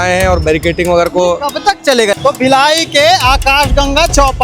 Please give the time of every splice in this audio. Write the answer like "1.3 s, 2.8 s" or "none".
2.2 s